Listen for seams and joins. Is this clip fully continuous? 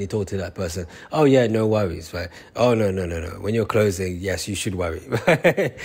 yes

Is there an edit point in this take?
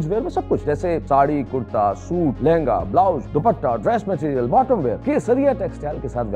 yes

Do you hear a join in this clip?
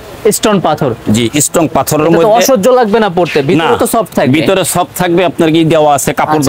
no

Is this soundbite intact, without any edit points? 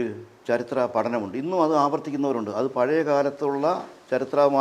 yes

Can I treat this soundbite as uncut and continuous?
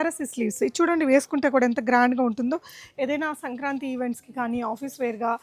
yes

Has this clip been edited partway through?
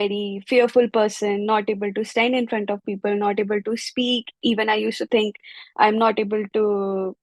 no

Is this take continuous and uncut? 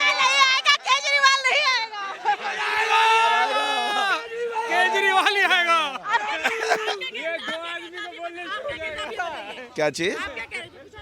yes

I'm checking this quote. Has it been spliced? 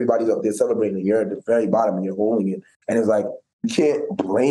yes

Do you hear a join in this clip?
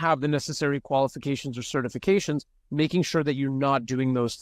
no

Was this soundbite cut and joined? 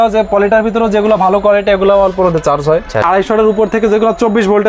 yes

